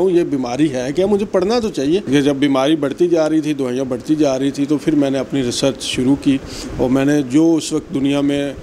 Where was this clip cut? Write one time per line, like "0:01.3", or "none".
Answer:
0:02.0